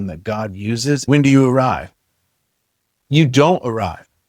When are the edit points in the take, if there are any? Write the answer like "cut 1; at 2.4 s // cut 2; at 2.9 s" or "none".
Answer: cut 1; at 1.1 s